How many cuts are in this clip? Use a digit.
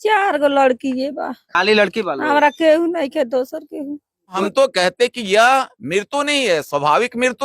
2